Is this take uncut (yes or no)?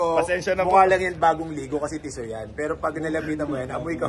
yes